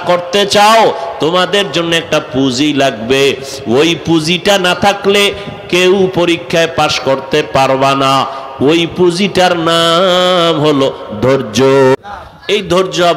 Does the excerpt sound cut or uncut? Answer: cut